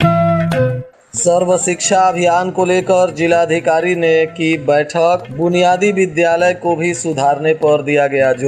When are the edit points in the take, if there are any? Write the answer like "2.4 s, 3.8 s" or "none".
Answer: 0.9 s